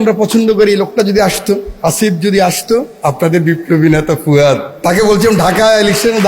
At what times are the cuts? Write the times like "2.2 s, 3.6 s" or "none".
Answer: 1.7 s, 2.9 s, 4.7 s